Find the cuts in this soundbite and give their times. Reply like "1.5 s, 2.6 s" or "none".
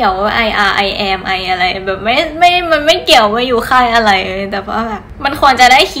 none